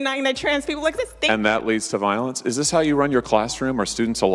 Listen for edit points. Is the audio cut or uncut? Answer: cut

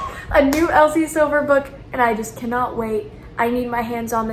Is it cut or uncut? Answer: uncut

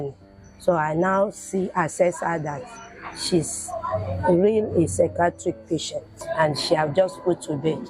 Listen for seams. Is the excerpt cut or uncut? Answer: cut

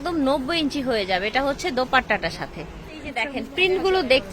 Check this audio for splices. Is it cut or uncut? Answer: cut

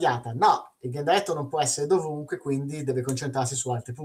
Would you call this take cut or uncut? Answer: uncut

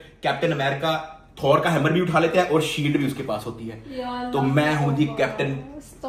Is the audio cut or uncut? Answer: uncut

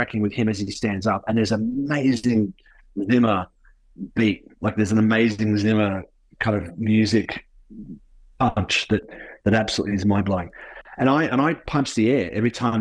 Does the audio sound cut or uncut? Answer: uncut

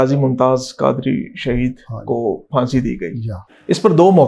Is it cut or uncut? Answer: uncut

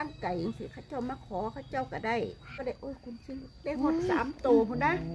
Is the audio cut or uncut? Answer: cut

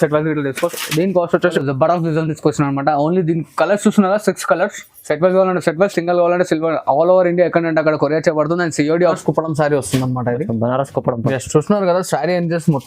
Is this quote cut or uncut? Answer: cut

